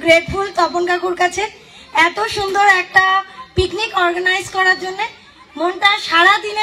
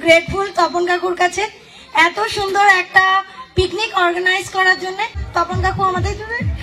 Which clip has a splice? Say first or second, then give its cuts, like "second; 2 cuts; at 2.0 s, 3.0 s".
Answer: second; 1 cut; at 5.3 s